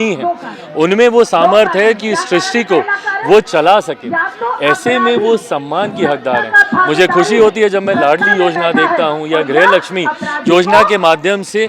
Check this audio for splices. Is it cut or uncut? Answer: uncut